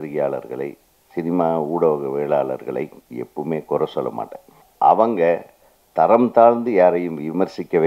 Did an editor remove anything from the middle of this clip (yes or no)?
yes